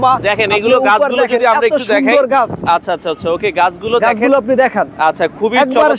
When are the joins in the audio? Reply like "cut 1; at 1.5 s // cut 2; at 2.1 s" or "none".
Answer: none